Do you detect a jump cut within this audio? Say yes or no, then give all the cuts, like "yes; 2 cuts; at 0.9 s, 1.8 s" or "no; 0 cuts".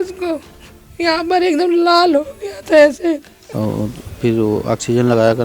yes; 1 cut; at 3.4 s